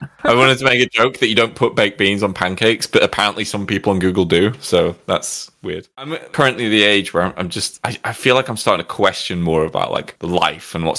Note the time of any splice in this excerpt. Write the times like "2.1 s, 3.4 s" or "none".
6.0 s